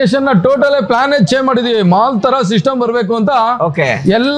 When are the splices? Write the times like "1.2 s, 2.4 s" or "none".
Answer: none

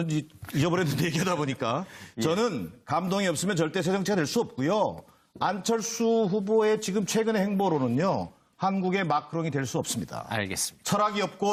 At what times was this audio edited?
none

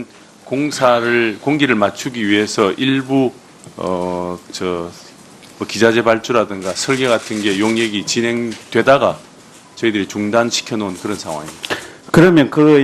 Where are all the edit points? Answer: 8.3 s

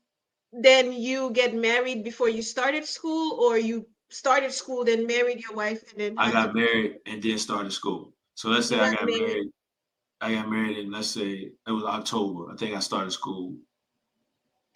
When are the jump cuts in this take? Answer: none

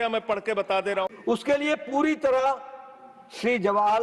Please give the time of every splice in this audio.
1.1 s

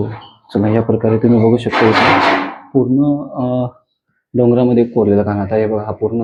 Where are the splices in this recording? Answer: none

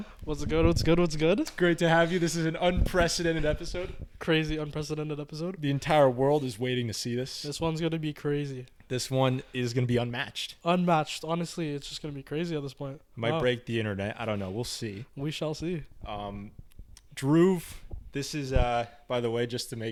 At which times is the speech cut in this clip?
none

